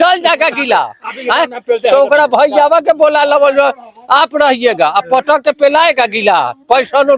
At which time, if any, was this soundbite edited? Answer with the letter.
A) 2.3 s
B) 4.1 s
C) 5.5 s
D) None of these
D